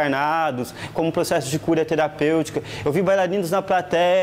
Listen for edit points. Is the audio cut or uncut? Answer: uncut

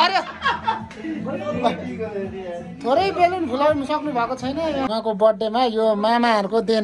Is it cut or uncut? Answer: cut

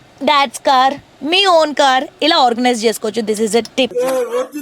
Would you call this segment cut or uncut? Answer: uncut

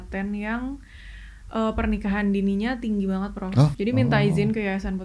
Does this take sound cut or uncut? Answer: cut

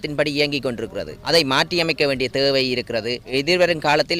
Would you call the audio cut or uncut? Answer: cut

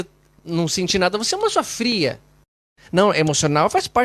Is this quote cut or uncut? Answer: cut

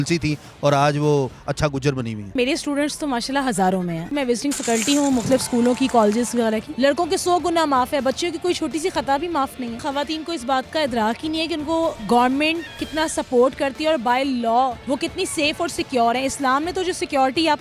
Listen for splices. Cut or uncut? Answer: cut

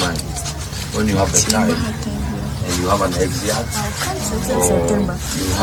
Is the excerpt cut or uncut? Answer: uncut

